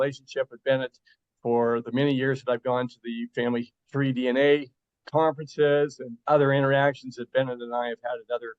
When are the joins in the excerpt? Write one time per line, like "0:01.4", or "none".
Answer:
0:03.8